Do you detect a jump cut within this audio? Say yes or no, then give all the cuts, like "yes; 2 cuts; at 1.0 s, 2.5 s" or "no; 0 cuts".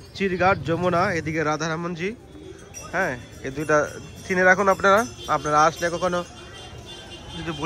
no; 0 cuts